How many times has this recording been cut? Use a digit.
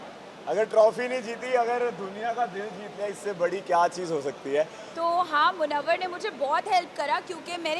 1